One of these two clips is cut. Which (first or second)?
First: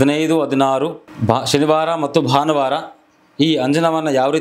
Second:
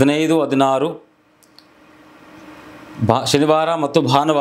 first